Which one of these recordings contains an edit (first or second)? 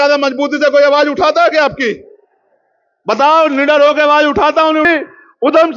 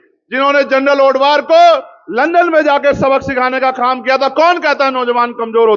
first